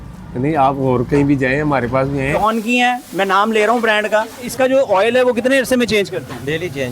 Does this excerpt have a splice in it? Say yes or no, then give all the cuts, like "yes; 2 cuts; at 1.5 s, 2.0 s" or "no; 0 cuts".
yes; 2 cuts; at 2.3 s, 4.5 s